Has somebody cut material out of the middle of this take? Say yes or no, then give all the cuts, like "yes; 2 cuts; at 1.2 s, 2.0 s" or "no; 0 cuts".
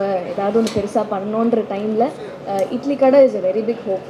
no; 0 cuts